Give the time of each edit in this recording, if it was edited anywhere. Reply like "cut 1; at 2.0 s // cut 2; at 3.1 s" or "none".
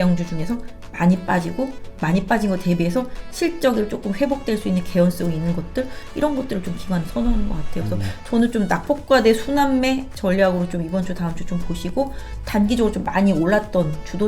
cut 1; at 1.9 s